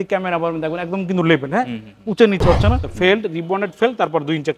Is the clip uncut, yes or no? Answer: no